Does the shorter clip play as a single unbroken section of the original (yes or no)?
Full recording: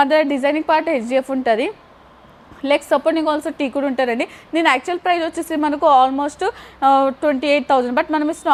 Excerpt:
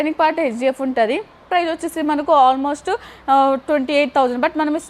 no